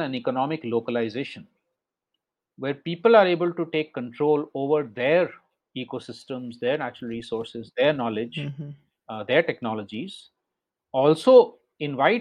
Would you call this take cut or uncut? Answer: uncut